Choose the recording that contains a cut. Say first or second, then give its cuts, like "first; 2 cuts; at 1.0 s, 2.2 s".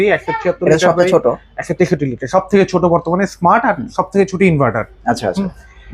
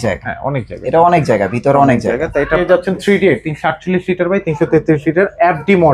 second; 1 cut; at 2.6 s